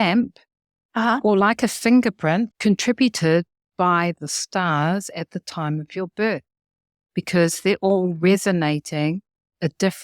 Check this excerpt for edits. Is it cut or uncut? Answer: cut